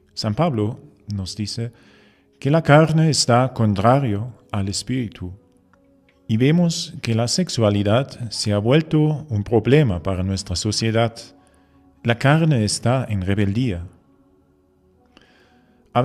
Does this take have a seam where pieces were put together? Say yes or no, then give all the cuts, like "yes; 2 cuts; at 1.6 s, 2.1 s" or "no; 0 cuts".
yes; 1 cut; at 13.5 s